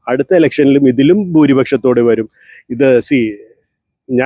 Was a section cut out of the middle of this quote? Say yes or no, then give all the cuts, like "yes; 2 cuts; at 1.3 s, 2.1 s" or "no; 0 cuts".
no; 0 cuts